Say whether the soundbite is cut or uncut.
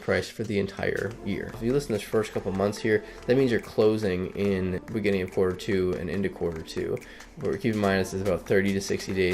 cut